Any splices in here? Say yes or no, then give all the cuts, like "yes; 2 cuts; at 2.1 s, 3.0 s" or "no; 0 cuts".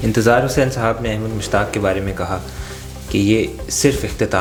no; 0 cuts